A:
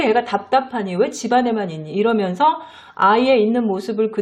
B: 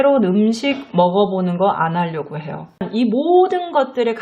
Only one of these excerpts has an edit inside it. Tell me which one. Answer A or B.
B